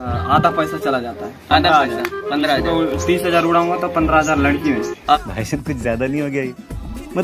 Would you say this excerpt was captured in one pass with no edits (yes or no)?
yes